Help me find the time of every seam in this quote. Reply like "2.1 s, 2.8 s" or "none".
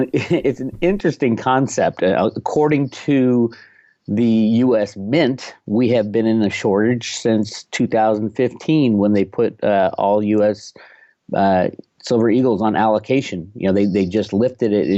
6.6 s